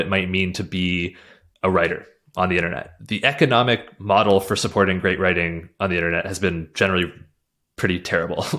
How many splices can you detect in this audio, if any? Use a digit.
1